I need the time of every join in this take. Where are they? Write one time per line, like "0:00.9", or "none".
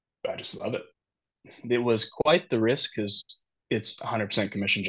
0:01.0